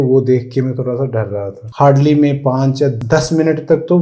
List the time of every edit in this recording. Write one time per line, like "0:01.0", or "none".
0:01.6
0:02.9